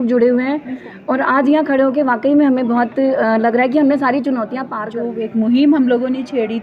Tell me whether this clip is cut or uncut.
cut